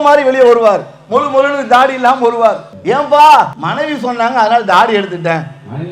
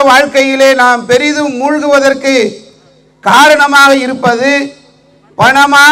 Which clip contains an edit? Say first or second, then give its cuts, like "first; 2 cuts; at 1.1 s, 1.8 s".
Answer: first; 2 cuts; at 2.7 s, 3.6 s